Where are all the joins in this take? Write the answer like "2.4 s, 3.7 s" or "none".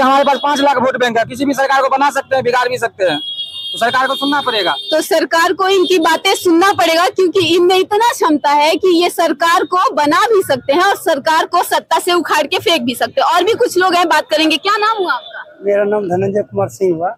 none